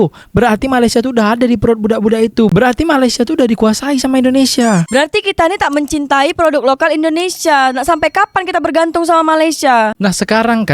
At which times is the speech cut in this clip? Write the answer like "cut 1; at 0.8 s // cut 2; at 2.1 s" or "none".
cut 1; at 4.9 s